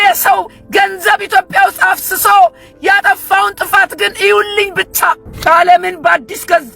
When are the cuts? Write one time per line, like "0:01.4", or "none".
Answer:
0:05.3